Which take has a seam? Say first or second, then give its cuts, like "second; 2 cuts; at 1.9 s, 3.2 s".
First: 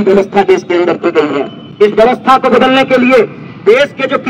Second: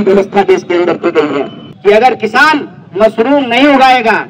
second; 1 cut; at 1.6 s